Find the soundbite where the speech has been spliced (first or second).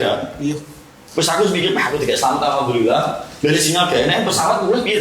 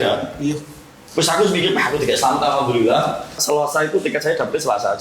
second